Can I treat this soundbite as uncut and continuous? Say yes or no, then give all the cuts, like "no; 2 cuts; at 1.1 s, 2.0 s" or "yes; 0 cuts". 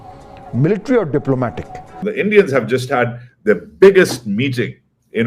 no; 1 cut; at 2.0 s